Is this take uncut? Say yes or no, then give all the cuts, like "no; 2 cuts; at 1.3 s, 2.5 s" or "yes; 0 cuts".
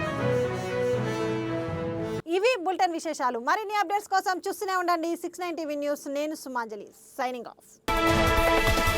yes; 0 cuts